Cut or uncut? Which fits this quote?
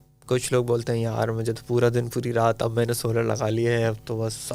uncut